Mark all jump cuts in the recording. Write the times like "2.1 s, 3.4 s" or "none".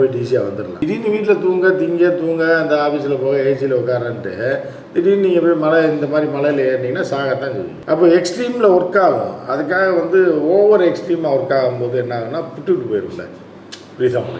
none

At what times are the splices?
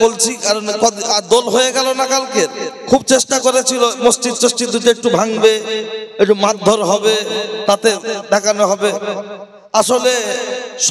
none

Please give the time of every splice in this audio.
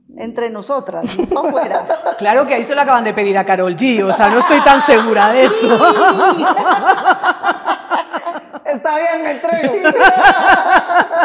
none

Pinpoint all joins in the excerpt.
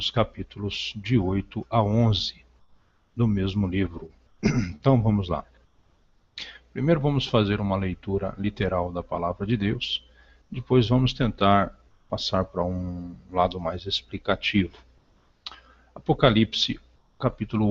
16.2 s

